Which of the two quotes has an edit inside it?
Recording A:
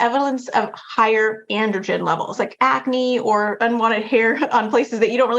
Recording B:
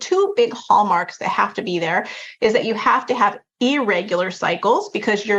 A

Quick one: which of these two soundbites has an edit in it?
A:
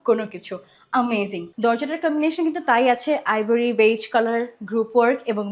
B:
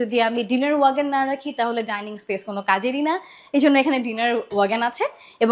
A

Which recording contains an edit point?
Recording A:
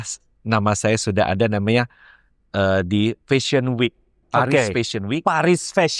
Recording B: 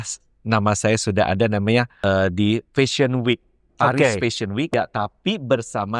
B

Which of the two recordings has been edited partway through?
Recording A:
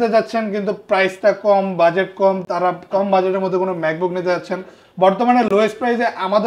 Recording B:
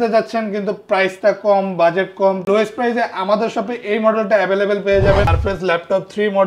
B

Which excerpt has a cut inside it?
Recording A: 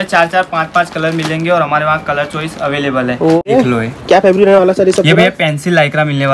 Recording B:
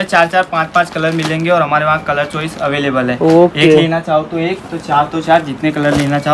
A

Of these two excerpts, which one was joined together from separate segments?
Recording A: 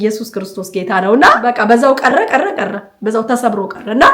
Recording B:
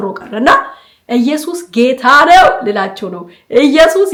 A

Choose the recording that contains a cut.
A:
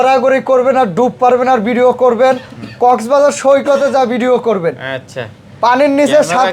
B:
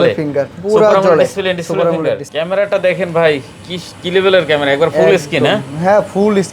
B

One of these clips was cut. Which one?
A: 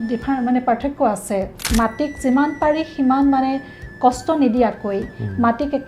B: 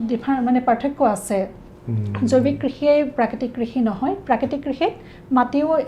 A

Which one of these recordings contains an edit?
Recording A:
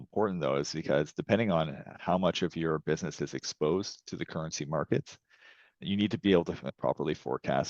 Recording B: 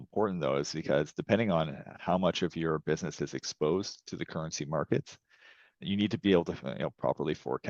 A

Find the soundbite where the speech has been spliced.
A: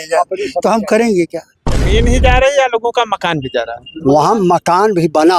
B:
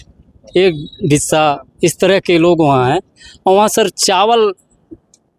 A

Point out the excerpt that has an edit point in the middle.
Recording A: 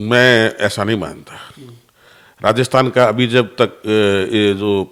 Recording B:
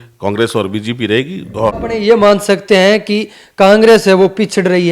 B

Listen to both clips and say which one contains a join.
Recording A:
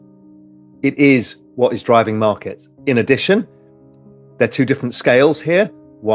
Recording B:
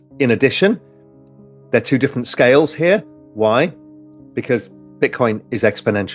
B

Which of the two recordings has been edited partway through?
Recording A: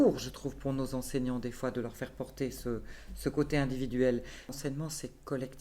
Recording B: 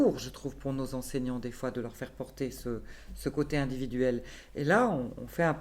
A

